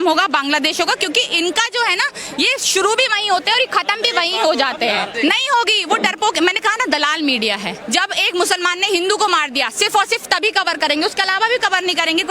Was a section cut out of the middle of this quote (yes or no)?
yes